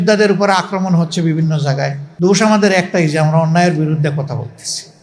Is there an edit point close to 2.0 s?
yes; 1 cut; at 2.0 s

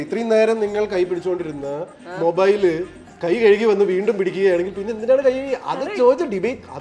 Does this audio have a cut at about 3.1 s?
no; 0 cuts

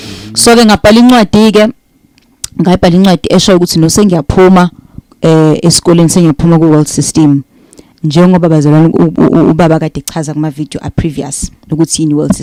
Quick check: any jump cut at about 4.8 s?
no; 0 cuts

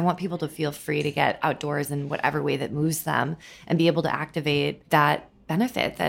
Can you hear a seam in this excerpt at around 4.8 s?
yes; 1 cut; at 4.8 s

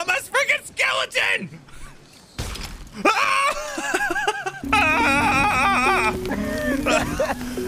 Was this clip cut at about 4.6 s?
yes; 1 cut; at 4.6 s

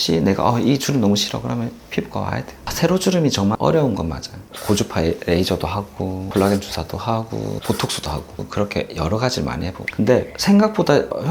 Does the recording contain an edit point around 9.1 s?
no; 4 cuts; at 2.6 s, 4.5 s, 6.2 s, 7.6 s

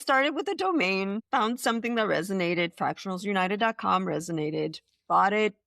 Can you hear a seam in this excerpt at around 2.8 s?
no; 1 cut; at 1.2 s

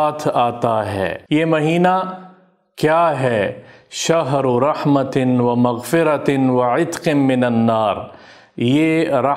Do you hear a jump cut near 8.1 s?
no; 1 cut; at 1.2 s

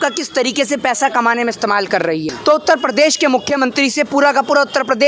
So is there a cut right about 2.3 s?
yes; 1 cut; at 2.3 s

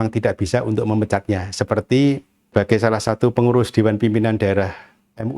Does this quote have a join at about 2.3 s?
yes; 1 cut; at 2.3 s

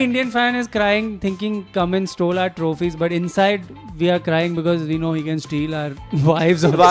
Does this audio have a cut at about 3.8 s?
no; 0 cuts

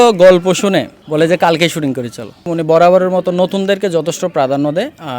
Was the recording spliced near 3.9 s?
no; 2 cuts; at 1.0 s, 2.5 s

